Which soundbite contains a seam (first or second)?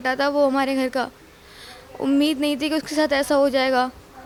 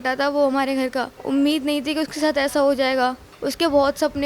second